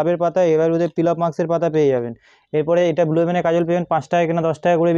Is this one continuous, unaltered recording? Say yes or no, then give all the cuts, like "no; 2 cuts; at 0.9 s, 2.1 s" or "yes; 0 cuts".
yes; 0 cuts